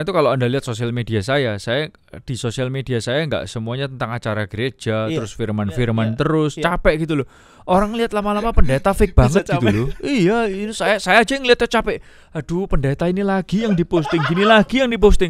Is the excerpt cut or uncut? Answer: uncut